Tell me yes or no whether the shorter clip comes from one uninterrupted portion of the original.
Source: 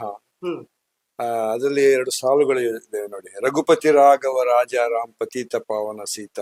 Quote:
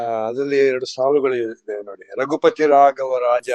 yes